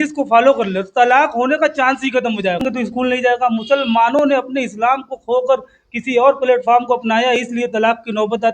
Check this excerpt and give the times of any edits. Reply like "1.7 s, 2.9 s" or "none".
2.6 s